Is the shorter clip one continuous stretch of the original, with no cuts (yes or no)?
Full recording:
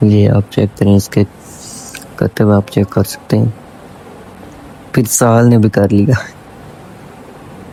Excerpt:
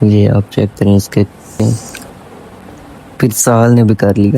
no